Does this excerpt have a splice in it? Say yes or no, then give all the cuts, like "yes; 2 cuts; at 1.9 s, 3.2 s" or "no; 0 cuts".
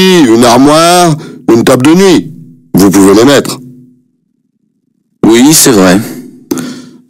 yes; 1 cut; at 0.9 s